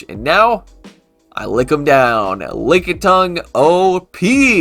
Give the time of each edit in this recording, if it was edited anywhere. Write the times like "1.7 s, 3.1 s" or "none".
none